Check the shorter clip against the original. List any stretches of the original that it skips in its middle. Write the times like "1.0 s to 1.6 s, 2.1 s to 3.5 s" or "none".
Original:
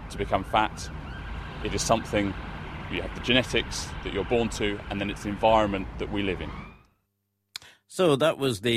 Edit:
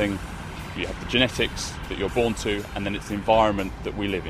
none